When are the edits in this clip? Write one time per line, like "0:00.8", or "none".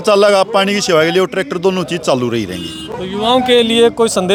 none